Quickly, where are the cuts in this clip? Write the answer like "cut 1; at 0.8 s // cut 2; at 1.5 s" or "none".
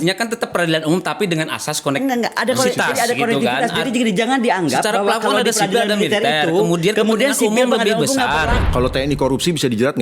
cut 1; at 8.6 s